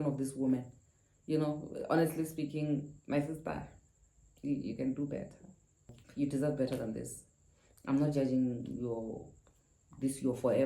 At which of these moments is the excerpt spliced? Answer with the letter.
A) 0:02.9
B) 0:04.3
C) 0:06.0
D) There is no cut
C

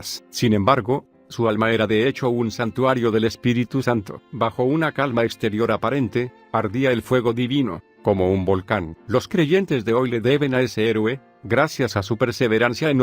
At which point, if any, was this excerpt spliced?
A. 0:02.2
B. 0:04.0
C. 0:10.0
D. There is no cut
C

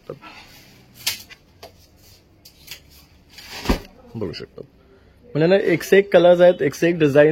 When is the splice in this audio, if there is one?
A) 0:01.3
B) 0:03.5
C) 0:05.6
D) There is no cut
A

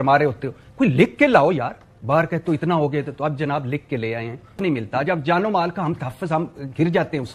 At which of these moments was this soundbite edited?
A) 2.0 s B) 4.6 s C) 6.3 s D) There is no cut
B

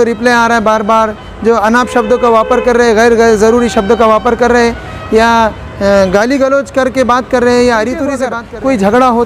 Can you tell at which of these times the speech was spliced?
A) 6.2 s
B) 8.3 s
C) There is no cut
B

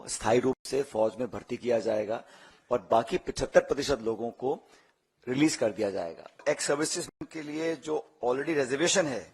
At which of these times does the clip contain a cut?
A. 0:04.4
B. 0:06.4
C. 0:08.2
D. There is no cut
B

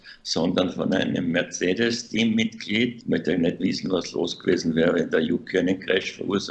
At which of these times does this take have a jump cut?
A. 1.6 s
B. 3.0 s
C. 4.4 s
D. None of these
B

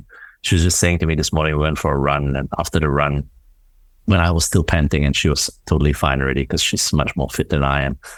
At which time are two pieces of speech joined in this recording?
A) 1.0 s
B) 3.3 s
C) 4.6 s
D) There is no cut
D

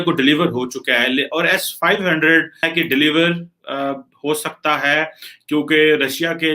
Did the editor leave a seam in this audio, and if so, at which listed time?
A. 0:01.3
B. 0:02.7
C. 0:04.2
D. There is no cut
B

